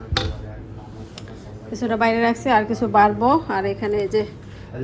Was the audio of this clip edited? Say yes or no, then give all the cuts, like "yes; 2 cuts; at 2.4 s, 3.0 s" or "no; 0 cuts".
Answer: no; 0 cuts